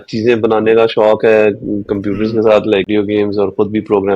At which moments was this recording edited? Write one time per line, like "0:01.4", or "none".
0:02.9